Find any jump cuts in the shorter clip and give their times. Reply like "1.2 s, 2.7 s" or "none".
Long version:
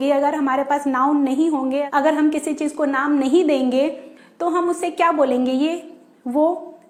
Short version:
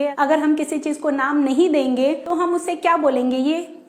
2.2 s